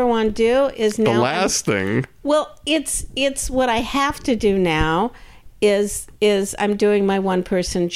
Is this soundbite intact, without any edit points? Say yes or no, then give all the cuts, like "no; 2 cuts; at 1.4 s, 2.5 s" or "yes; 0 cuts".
yes; 0 cuts